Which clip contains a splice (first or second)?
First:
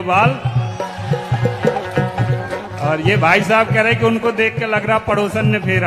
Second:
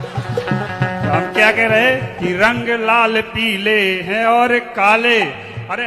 second